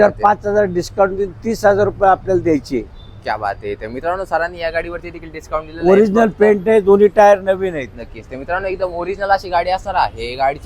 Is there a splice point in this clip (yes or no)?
no